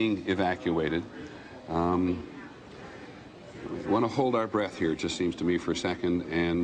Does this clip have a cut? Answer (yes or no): no